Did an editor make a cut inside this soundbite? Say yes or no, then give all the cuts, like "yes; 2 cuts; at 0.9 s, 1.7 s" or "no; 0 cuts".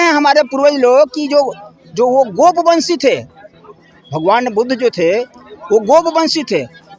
no; 0 cuts